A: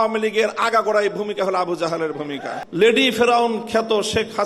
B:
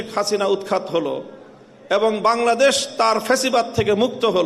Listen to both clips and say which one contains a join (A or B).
A